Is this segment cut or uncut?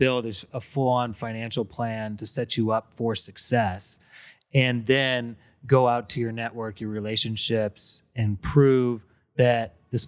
uncut